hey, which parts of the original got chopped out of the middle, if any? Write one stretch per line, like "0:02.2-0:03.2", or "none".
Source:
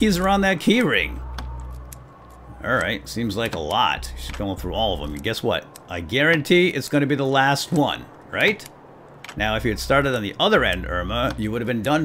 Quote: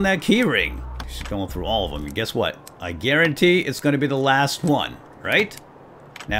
0:01.5-0:04.2